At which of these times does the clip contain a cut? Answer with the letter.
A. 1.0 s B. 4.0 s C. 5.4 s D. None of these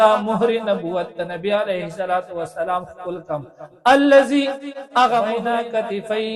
C